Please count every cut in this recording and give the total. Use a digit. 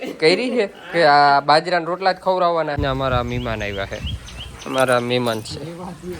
1